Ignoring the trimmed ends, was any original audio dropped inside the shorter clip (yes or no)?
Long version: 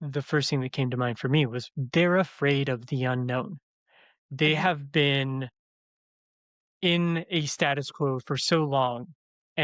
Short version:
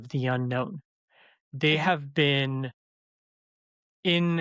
no